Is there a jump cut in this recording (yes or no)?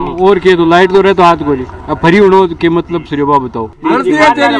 yes